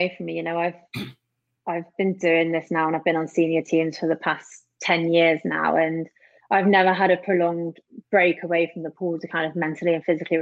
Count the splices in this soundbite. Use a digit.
0